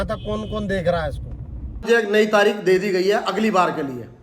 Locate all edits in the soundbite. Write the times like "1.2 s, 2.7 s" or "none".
1.9 s

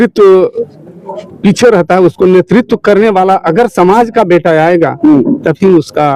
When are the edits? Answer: none

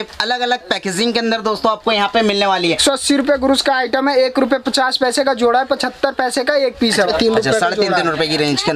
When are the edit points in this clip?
2.8 s, 7.1 s

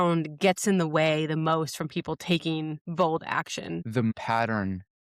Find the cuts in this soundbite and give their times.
4.1 s

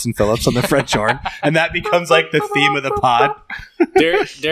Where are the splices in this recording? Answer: none

